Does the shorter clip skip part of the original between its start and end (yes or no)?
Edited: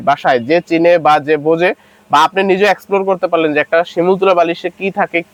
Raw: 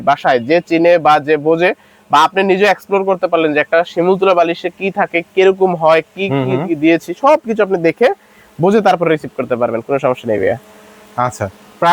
no